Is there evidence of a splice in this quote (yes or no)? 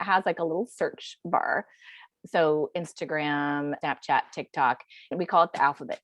yes